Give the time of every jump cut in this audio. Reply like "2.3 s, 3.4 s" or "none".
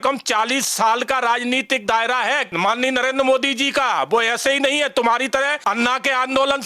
2.5 s, 5.6 s